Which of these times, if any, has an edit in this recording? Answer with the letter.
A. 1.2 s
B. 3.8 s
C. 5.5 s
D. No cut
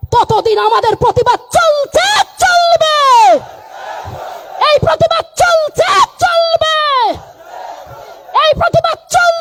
D